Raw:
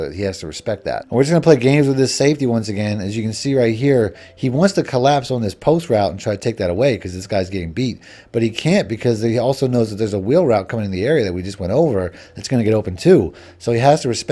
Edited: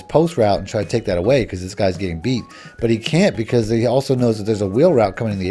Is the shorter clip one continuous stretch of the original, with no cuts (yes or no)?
yes